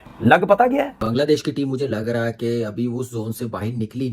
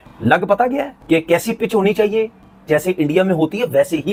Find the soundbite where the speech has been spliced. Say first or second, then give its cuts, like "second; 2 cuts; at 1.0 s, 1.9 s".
first; 1 cut; at 0.9 s